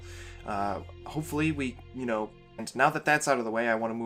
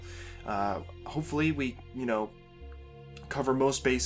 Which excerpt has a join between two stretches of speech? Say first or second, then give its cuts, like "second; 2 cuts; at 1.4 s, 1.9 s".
second; 1 cut; at 2.7 s